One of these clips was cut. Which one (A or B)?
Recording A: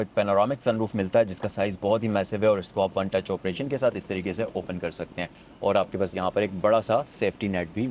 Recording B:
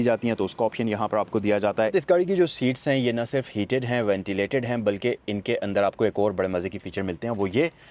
B